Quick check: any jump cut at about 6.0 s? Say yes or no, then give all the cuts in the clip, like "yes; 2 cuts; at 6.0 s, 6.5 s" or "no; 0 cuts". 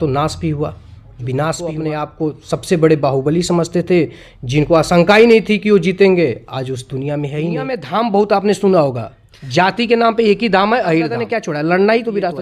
no; 3 cuts; at 2.0 s, 7.8 s, 11.2 s